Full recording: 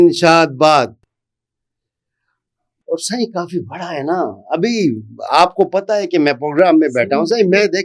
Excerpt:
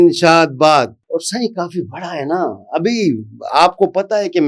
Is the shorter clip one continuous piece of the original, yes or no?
no